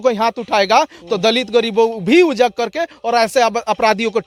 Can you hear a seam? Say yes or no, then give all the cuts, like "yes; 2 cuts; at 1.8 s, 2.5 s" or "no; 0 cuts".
no; 0 cuts